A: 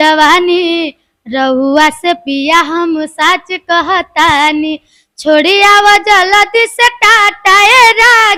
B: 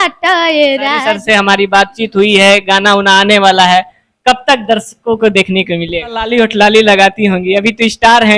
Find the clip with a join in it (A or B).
B